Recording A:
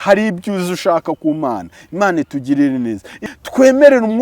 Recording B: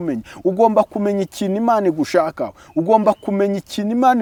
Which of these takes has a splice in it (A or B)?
A